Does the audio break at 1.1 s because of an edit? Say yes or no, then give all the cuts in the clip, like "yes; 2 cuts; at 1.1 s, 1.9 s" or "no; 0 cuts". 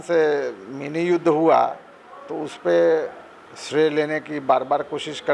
no; 0 cuts